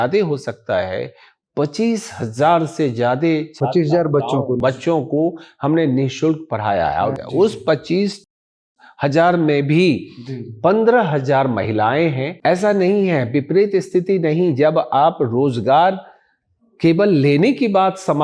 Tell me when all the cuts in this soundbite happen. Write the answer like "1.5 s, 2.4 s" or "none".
7.1 s, 12.3 s